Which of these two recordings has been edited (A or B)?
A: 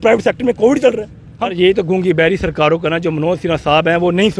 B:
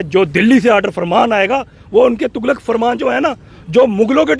A